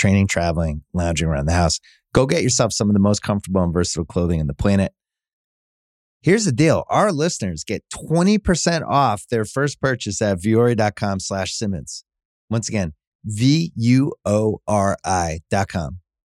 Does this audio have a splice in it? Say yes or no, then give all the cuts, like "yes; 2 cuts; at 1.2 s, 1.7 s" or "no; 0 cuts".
no; 0 cuts